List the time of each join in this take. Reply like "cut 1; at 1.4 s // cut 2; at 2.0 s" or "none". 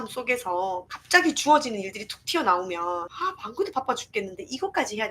cut 1; at 0.9 s // cut 2; at 3.1 s

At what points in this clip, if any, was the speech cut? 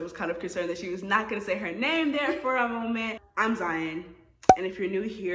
cut 1; at 3.2 s

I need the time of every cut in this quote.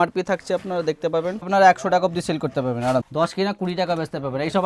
cut 1; at 1.5 s // cut 2; at 3.1 s

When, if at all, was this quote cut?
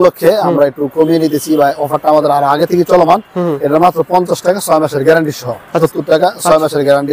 cut 1; at 5.8 s

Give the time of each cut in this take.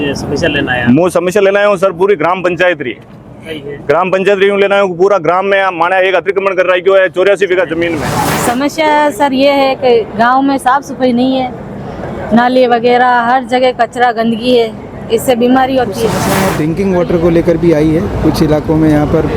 cut 1; at 8.1 s // cut 2; at 16.2 s

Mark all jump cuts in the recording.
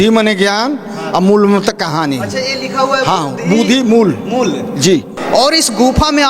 cut 1; at 5.2 s

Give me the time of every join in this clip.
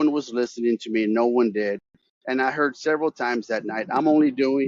none

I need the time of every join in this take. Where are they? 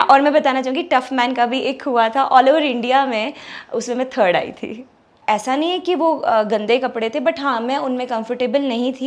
cut 1; at 5.1 s

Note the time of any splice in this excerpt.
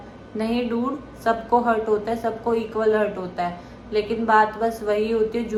none

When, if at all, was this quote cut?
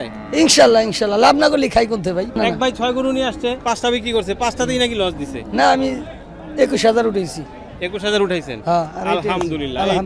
cut 1; at 2.4 s // cut 2; at 3.6 s

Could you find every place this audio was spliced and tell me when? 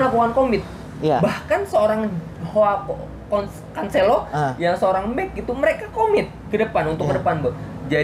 none

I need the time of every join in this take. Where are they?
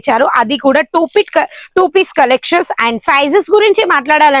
none

